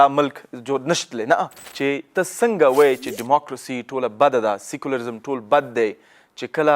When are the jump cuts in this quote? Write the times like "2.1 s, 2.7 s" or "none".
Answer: 1.6 s